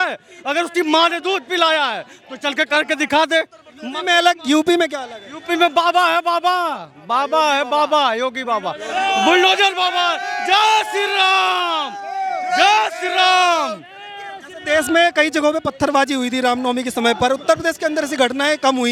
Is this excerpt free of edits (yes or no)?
yes